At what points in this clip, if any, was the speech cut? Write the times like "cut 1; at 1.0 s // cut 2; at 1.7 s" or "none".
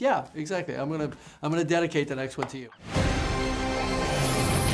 cut 1; at 2.7 s